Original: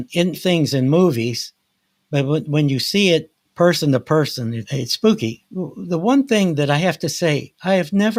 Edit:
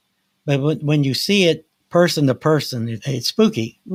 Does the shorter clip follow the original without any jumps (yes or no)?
yes